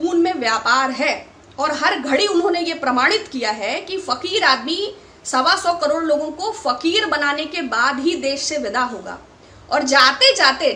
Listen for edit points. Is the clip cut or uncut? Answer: uncut